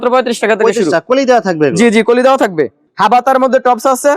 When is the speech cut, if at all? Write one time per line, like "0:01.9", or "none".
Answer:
0:02.9